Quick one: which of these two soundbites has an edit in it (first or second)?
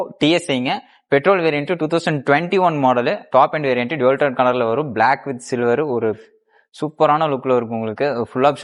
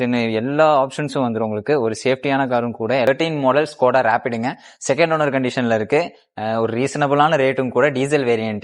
second